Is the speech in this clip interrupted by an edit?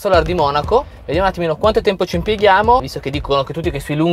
yes; 1 cut; at 0.9 s

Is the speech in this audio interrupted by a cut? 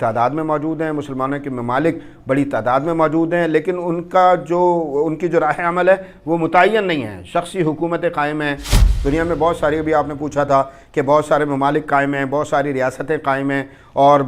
yes; 1 cut; at 8.7 s

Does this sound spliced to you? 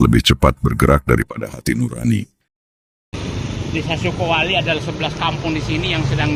no; 0 cuts

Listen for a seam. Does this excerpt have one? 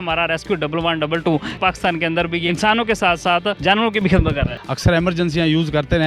yes; 4 cuts; at 1.5 s, 2.5 s, 3.6 s, 4.5 s

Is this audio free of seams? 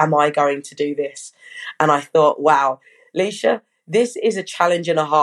yes; 0 cuts

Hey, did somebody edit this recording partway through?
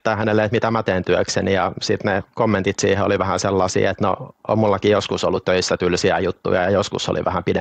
no; 0 cuts

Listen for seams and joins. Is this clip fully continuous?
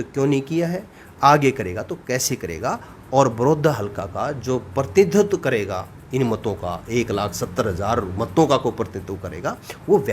yes; 0 cuts

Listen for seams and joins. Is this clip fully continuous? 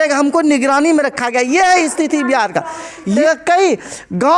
no; 1 cut; at 3.1 s

